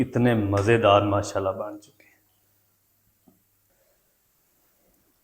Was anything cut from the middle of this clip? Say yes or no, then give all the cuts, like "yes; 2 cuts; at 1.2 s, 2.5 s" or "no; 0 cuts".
yes; 1 cut; at 3.5 s